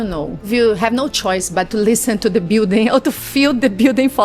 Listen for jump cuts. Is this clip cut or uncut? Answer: uncut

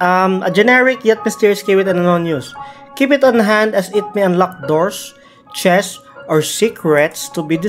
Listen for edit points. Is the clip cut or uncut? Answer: uncut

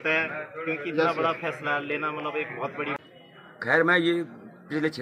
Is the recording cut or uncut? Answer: cut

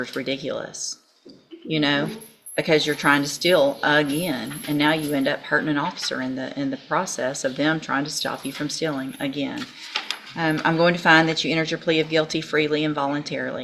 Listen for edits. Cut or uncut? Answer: uncut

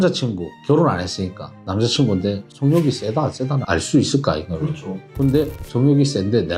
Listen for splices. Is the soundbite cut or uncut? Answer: uncut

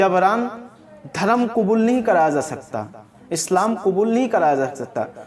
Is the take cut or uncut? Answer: uncut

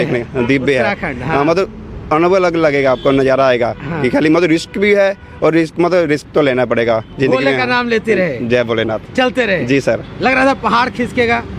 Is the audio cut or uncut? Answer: uncut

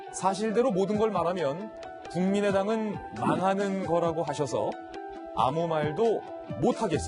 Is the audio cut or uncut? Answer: cut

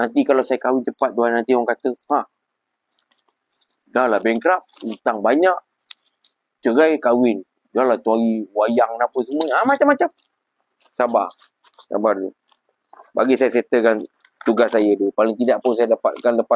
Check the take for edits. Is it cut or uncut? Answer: uncut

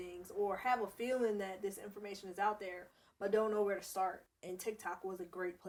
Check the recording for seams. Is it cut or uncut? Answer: uncut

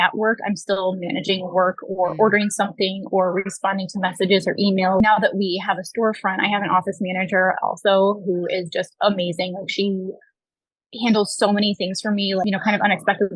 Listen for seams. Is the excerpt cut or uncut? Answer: cut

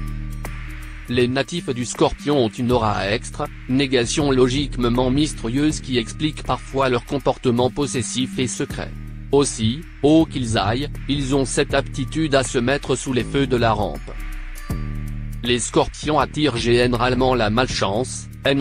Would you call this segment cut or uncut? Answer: cut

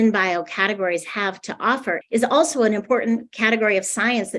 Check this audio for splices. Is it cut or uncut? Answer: uncut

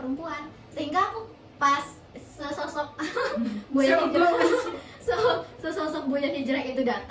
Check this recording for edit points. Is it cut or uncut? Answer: uncut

